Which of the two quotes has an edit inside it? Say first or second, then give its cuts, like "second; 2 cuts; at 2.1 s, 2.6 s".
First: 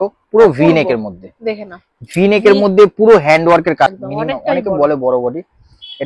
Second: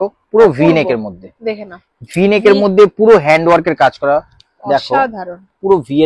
first; 1 cut; at 4.0 s